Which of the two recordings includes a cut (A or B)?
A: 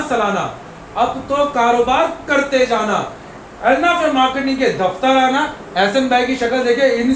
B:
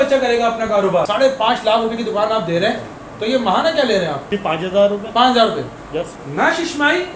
B